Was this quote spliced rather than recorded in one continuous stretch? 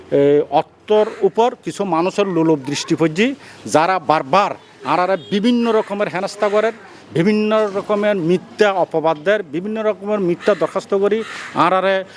no; 0 cuts

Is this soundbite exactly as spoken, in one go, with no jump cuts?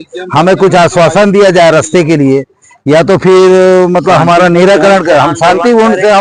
yes; 0 cuts

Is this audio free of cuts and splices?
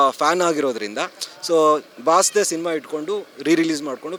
yes; 0 cuts

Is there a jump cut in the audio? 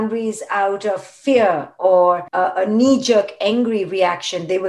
yes; 1 cut; at 2.3 s

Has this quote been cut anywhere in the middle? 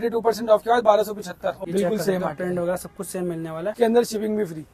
yes; 2 cuts; at 1.6 s, 3.7 s

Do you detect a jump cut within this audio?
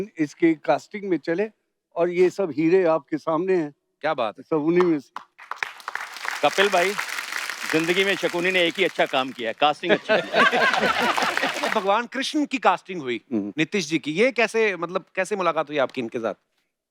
yes; 1 cut; at 11.7 s

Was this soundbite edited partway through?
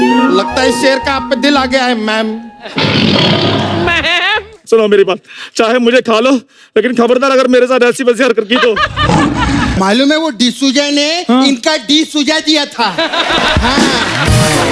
yes; 1 cut; at 9.8 s

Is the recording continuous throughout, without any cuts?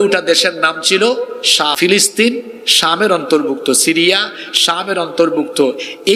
no; 1 cut; at 1.7 s

